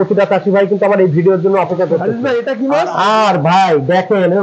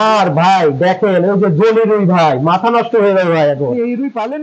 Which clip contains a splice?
first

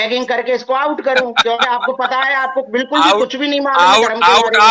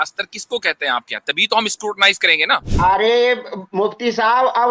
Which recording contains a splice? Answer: second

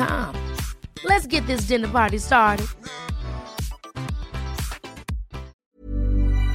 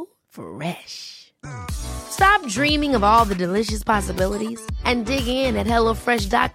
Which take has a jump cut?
first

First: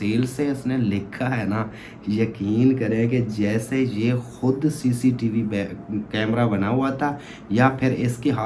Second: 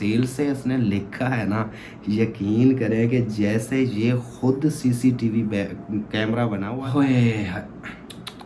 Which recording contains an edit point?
second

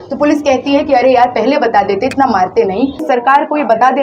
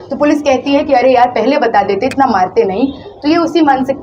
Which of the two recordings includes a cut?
first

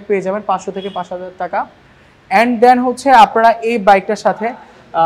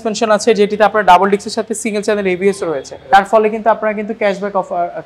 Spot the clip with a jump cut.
second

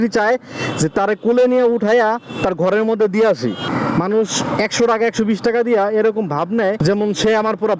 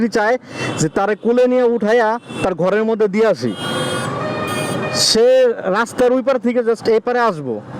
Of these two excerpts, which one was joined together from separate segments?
first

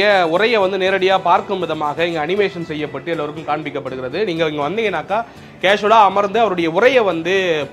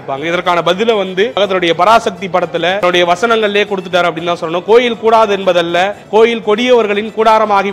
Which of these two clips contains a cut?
second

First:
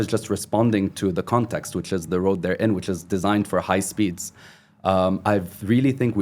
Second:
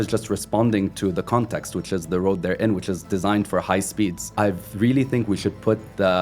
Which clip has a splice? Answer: second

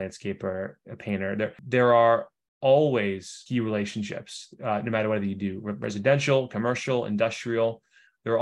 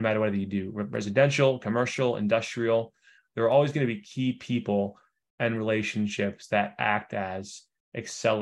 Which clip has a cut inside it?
first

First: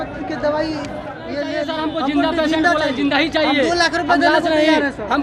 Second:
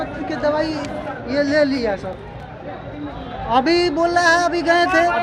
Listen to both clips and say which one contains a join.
first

